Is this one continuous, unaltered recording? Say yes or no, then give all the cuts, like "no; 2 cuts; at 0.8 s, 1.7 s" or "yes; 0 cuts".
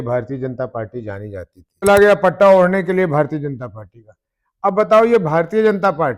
no; 1 cut; at 1.8 s